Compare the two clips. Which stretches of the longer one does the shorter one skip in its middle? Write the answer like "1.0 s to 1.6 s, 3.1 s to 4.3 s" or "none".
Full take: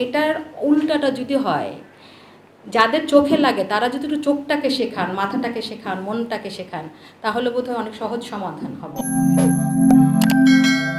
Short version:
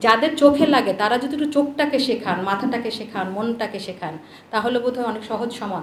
none